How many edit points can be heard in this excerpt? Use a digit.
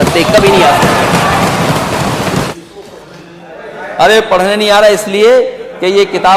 1